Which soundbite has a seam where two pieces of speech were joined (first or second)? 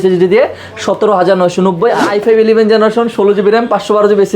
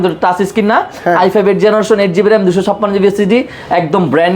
first